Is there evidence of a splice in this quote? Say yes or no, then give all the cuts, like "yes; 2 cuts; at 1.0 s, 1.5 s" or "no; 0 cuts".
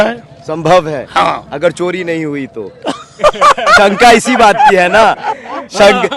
no; 0 cuts